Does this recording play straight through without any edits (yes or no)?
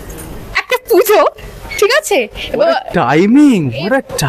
yes